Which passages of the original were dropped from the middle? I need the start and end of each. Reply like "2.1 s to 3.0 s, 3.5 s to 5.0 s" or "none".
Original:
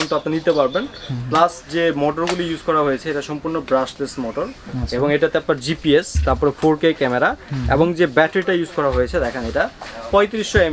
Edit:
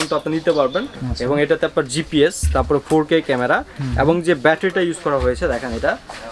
1.0 s to 4.7 s